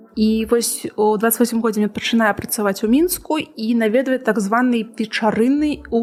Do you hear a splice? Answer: no; 0 cuts

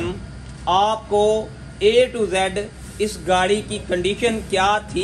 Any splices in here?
no; 0 cuts

